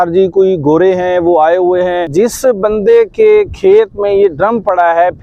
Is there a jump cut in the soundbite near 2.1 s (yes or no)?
yes